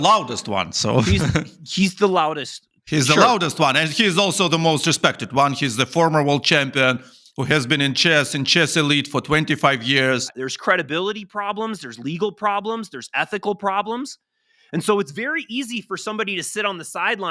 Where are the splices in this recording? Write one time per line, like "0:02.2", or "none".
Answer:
0:10.3